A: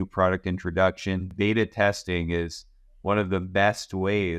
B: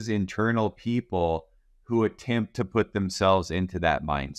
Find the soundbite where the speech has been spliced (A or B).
A